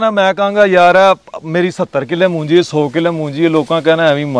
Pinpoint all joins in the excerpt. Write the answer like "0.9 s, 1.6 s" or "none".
none